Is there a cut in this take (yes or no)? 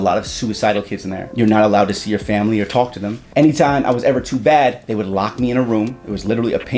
yes